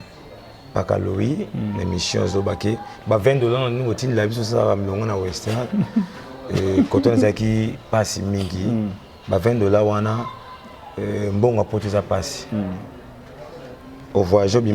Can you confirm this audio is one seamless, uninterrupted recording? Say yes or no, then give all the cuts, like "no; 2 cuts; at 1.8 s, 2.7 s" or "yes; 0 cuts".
yes; 0 cuts